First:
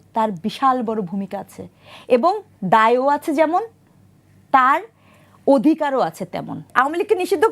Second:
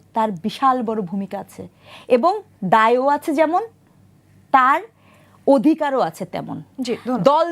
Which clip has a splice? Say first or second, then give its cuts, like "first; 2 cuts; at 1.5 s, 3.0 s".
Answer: first; 1 cut; at 6.6 s